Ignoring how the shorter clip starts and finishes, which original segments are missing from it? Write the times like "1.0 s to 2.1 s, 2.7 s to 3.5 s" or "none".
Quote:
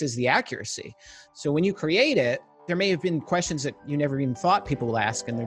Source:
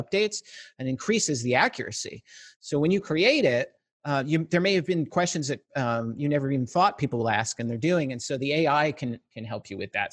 3.9 s to 4.5 s, 5.7 s to 6.1 s

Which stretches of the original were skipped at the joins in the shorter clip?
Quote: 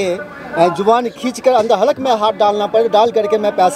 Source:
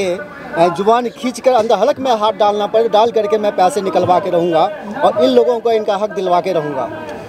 none

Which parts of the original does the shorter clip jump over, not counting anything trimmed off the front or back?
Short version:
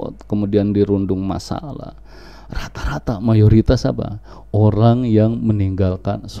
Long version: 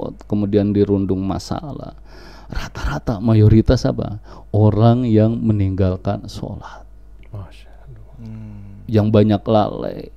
none

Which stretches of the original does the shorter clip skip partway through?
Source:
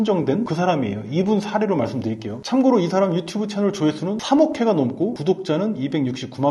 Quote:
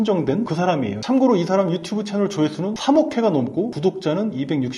1.0 s to 2.4 s

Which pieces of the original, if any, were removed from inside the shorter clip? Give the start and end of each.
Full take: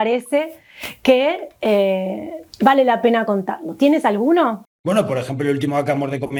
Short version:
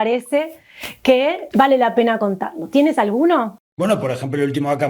1.4 s to 2.5 s

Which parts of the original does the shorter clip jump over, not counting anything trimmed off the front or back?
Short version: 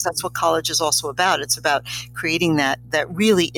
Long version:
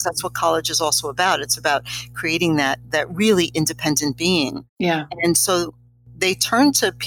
none

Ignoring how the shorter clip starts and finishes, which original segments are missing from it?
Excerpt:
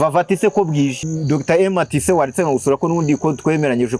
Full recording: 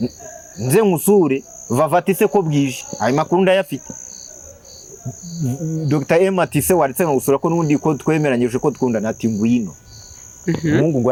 2.8 s to 5.7 s

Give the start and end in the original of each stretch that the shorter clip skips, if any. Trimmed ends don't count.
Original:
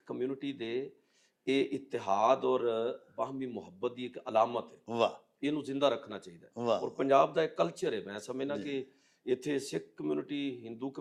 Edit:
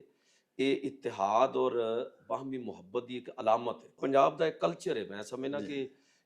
4.8 s to 6.9 s

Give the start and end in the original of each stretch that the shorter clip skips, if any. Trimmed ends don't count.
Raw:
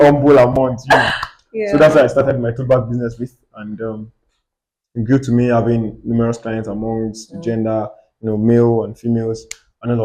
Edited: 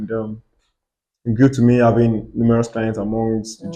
none

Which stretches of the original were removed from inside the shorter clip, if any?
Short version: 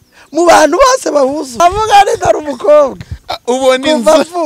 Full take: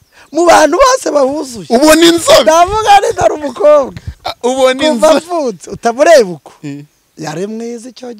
1.6 s to 2.6 s

